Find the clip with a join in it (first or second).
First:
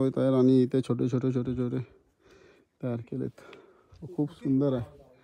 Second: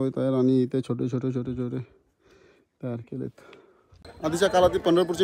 second